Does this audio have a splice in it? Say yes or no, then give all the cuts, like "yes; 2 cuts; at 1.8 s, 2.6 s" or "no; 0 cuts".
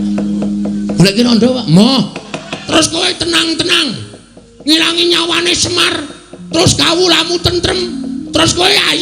yes; 1 cut; at 2.6 s